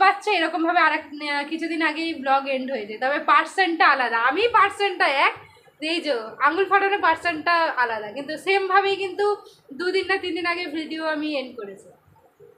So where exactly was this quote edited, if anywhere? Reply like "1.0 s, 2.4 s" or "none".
none